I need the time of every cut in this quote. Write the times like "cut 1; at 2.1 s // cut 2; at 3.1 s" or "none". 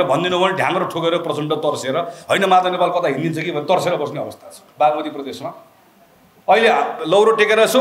cut 1; at 4.6 s